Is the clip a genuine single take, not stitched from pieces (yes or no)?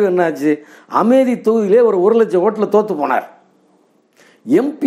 yes